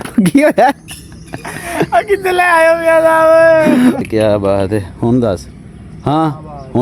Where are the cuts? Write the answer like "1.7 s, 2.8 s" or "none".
4.1 s